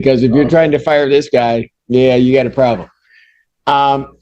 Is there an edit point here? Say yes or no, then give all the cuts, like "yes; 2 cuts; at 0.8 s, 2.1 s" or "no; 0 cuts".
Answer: no; 0 cuts